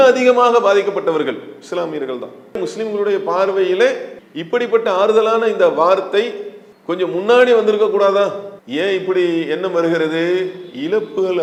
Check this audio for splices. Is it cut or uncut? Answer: uncut